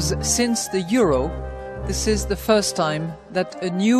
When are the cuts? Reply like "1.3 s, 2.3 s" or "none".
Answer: none